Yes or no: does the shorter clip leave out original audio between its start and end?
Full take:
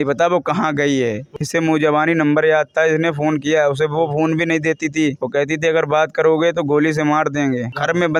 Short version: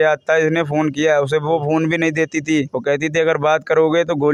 no